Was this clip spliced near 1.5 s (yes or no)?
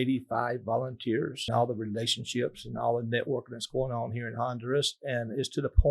yes